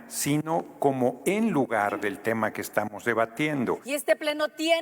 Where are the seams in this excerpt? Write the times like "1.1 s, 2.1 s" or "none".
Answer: 3.8 s